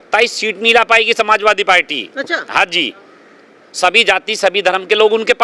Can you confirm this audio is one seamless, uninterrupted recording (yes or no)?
yes